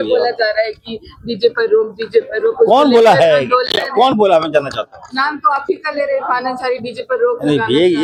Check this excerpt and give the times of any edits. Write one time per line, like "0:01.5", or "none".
none